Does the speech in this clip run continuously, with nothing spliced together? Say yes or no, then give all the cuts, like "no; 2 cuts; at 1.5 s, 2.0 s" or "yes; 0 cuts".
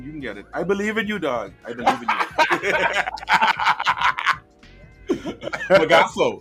yes; 0 cuts